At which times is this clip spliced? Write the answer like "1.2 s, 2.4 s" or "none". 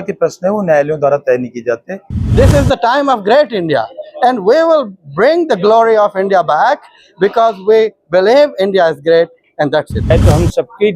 2.2 s, 10.1 s

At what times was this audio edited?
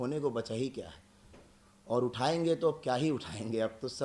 none

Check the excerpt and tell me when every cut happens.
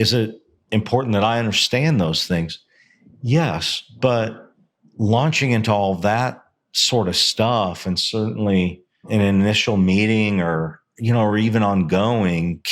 9.1 s

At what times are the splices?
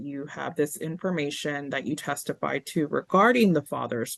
none

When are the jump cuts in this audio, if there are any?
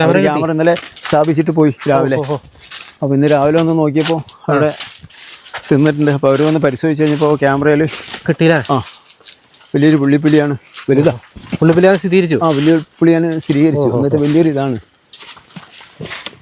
none

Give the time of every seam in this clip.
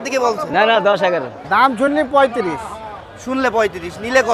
1.3 s

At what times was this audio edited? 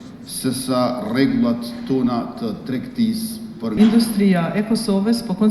3.7 s

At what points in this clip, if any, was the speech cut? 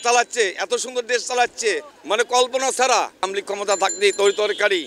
1.9 s, 3.3 s

